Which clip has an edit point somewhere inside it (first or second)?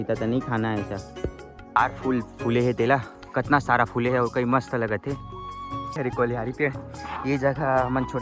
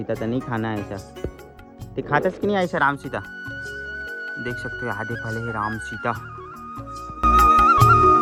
first